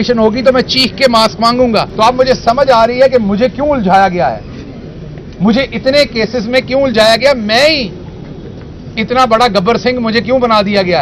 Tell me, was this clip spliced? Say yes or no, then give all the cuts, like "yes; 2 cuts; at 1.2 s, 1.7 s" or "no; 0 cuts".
yes; 1 cut; at 1.9 s